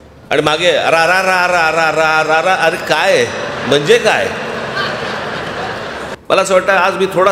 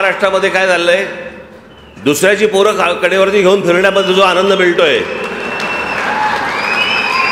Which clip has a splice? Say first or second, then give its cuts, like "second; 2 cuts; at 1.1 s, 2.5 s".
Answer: first; 1 cut; at 6.1 s